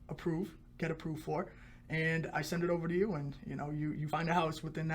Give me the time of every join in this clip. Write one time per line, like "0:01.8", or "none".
0:04.0

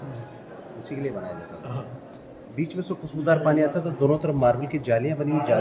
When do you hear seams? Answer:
none

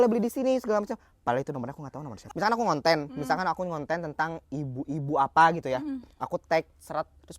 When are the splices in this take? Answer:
0:02.2

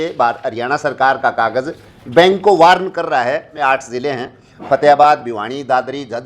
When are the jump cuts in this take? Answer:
0:03.5

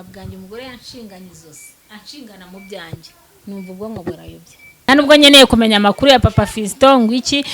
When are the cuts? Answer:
0:04.9

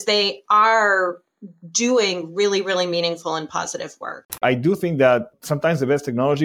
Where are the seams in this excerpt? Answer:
0:04.4
0:05.4

